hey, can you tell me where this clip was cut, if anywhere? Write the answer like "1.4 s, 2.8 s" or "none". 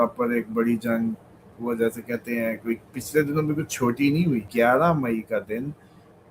4.5 s